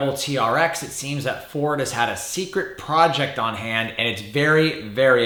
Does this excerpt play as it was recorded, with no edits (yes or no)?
yes